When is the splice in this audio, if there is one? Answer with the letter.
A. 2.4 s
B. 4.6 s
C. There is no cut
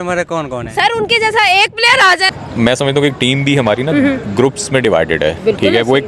A